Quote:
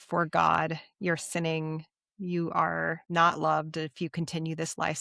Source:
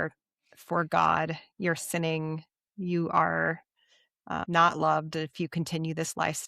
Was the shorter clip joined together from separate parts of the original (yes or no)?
yes